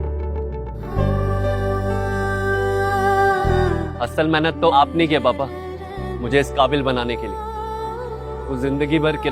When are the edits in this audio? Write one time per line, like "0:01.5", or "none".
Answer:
0:03.7